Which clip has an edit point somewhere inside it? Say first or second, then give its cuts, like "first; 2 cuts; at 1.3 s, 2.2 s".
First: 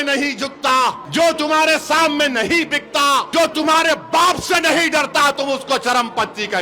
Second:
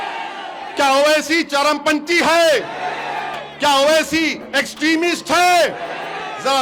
first; 2 cuts; at 1.0 s, 3.3 s